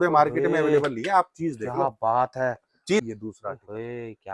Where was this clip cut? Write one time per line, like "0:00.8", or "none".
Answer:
0:03.0